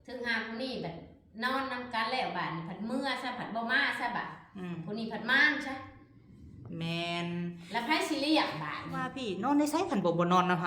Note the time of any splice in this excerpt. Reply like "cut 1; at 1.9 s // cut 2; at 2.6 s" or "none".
cut 1; at 9.5 s